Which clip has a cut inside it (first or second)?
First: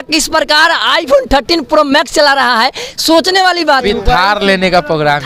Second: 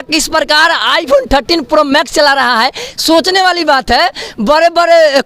first